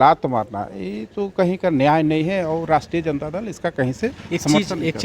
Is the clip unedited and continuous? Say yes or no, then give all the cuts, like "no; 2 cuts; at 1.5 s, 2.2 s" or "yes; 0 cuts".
yes; 0 cuts